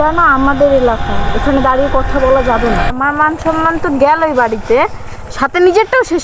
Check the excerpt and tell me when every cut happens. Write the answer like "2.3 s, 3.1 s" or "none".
2.9 s